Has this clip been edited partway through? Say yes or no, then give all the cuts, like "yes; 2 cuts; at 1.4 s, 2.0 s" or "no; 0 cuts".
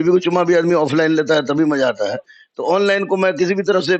no; 0 cuts